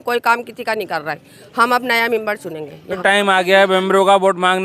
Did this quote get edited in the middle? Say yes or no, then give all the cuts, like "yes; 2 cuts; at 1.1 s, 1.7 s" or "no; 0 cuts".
yes; 1 cut; at 2.8 s